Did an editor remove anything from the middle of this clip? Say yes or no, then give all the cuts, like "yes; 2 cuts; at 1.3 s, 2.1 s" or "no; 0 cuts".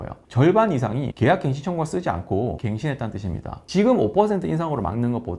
yes; 3 cuts; at 1.1 s, 2.6 s, 3.6 s